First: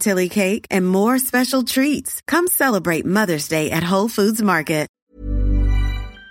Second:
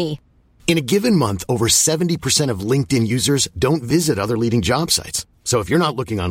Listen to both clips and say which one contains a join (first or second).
first